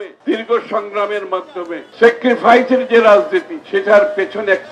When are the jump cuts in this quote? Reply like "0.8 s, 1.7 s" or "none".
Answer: none